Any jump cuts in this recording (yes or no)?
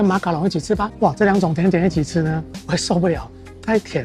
yes